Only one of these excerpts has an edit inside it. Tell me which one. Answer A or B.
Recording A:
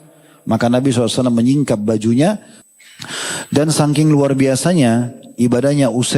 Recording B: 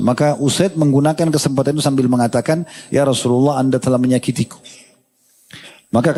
A